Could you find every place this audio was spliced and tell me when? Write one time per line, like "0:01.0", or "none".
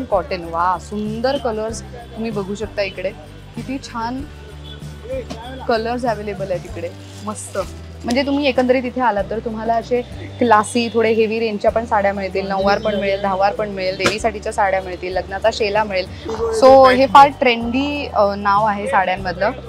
0:08.0
0:16.2